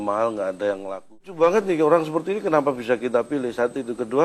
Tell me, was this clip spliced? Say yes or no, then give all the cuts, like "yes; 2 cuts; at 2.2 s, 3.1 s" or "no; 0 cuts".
yes; 1 cut; at 1.2 s